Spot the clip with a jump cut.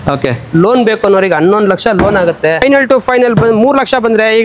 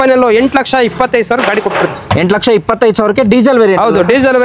first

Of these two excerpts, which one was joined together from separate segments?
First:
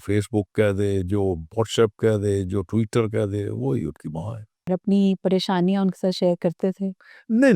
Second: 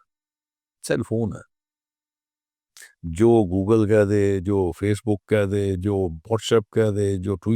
first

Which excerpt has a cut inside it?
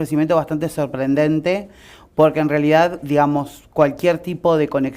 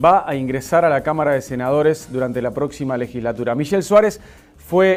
first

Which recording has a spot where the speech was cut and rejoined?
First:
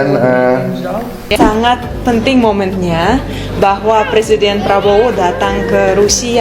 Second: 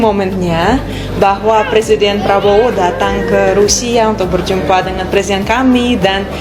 first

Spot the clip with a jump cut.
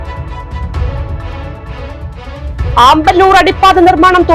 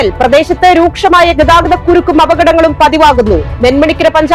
first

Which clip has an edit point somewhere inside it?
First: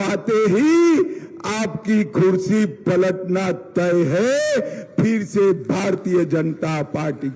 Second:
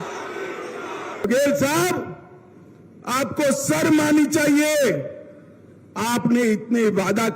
second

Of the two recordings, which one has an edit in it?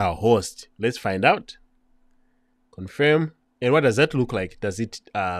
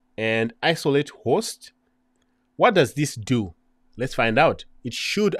first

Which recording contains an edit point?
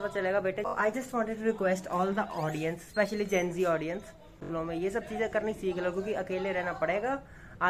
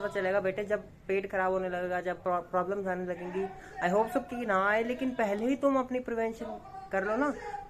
first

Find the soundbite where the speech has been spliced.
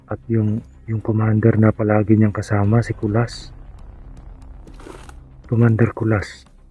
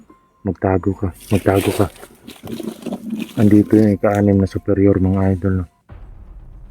second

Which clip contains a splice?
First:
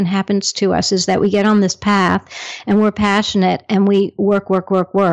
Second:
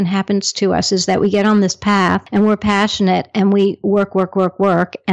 second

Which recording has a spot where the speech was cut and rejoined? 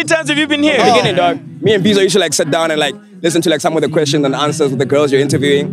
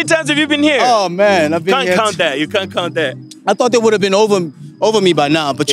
first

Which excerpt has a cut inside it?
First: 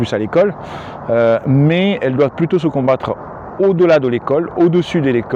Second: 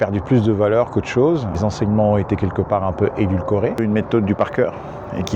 second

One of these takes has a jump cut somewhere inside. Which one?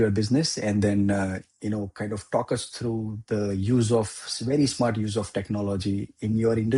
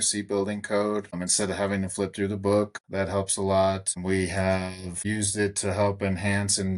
second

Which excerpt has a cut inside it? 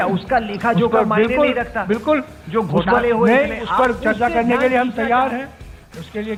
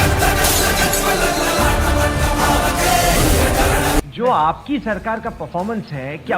second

